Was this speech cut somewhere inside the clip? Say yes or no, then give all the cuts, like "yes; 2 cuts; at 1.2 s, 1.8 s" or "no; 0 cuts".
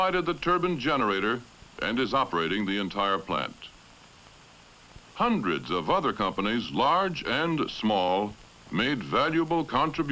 yes; 1 cut; at 7.6 s